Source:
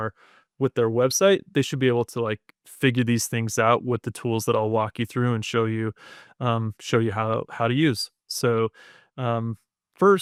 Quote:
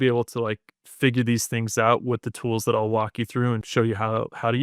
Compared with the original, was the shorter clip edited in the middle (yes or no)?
yes